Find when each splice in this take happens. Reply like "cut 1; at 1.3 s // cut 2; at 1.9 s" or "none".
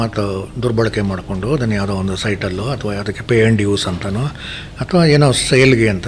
none